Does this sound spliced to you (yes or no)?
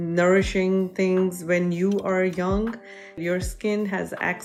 no